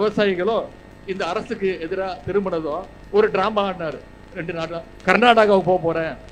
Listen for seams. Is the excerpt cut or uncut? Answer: uncut